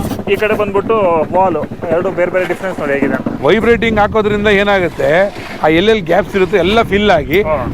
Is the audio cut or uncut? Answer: cut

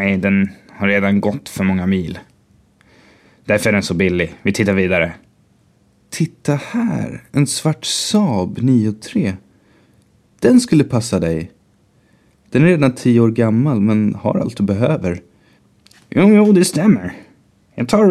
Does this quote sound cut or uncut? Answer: cut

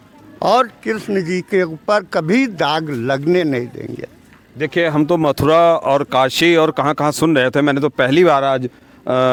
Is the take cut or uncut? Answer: uncut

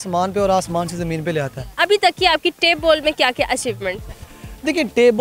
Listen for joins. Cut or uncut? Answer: uncut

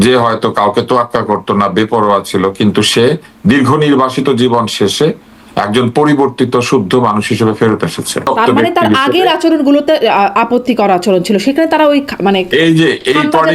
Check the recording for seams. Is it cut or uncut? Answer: cut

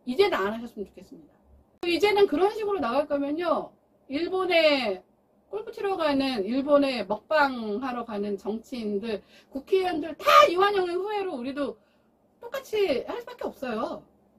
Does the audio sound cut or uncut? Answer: cut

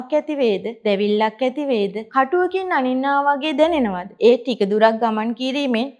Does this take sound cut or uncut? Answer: uncut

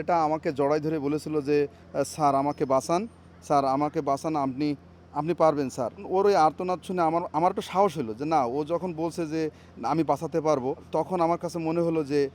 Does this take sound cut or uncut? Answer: uncut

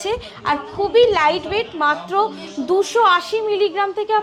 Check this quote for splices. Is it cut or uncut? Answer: uncut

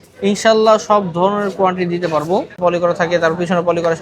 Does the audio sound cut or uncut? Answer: cut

